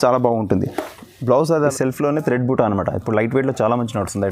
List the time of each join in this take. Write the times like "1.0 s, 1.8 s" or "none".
1.7 s